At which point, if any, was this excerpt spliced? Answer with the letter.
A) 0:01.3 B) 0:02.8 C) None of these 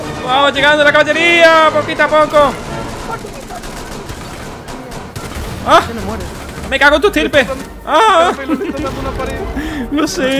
B